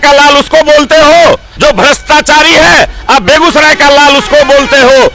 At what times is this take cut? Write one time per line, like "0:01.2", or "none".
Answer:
0:01.5